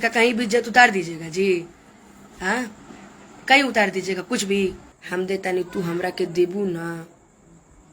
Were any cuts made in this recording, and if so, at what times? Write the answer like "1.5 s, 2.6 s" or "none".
4.9 s